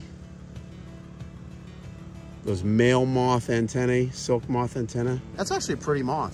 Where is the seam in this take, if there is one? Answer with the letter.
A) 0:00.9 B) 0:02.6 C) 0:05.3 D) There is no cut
C